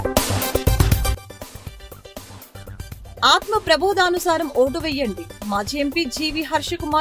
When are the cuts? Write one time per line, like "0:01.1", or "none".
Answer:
none

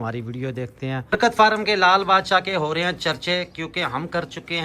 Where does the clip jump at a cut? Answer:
0:01.0

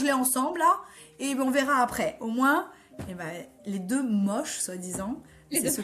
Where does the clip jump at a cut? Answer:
none

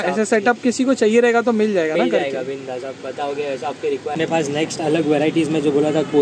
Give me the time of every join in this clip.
0:04.1

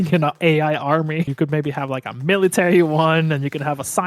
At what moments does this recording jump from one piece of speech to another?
0:01.3

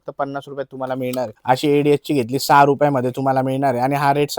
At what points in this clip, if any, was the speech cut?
0:01.4

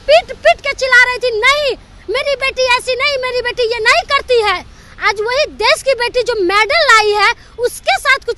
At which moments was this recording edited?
none

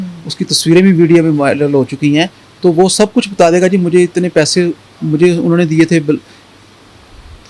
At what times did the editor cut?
none

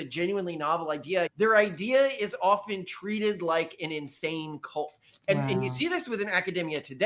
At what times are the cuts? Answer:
0:01.3

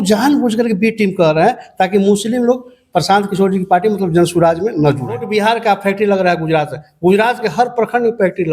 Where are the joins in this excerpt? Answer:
0:05.2

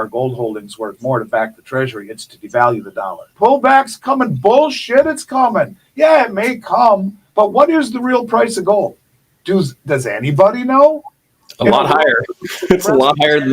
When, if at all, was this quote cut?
0:03.2

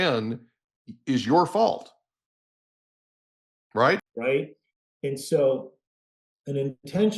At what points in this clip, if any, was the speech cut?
0:04.1

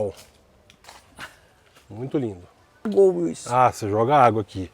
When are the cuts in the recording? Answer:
0:02.9

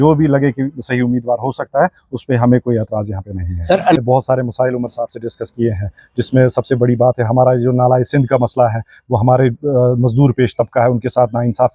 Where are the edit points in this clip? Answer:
0:04.0

